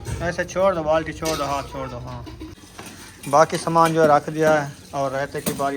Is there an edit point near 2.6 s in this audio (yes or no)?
yes